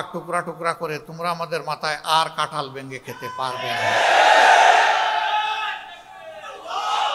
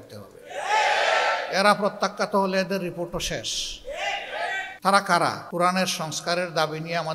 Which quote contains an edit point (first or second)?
second